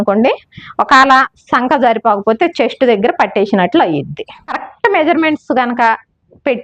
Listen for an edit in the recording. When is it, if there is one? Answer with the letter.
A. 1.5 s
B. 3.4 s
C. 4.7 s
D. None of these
C